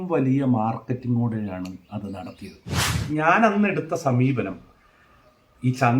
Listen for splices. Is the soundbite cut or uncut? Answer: cut